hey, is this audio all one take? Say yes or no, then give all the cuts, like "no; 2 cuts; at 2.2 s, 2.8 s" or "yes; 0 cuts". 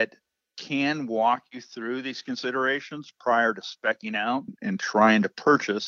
yes; 0 cuts